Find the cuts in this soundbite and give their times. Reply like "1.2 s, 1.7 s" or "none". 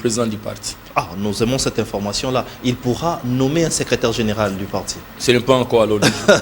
none